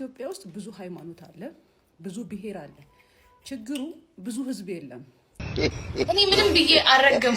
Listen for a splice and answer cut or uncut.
cut